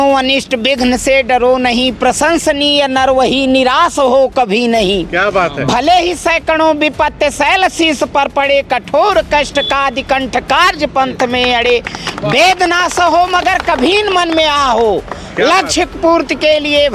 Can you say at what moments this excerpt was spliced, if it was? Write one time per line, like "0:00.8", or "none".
none